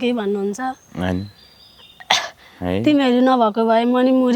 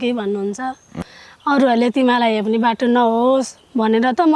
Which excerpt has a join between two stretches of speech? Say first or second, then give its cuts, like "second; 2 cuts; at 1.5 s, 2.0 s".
second; 1 cut; at 1.0 s